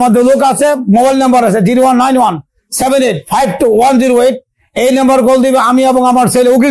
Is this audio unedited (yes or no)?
yes